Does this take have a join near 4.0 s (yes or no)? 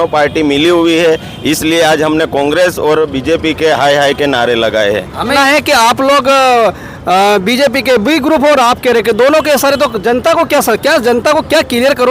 no